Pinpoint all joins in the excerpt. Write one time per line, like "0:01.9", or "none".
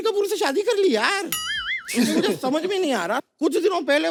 none